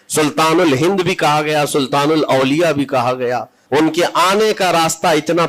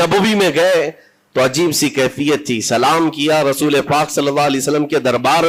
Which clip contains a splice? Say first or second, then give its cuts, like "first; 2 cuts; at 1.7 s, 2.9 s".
first; 1 cut; at 3.5 s